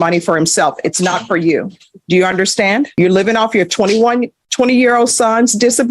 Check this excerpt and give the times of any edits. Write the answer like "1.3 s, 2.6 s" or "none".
2.9 s